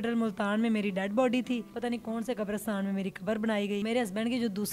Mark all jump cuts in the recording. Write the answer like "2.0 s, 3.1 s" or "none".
1.7 s, 3.8 s